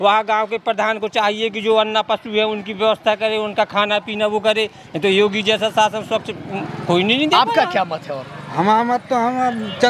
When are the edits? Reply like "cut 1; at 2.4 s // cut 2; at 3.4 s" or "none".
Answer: none